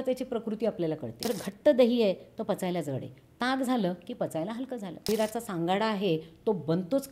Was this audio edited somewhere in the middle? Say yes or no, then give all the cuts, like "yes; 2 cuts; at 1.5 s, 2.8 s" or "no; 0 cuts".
yes; 2 cuts; at 1.3 s, 5.1 s